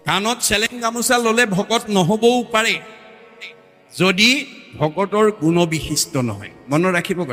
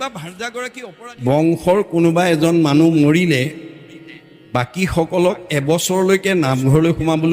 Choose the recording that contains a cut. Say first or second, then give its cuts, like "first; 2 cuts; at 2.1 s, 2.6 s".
second; 1 cut; at 1.2 s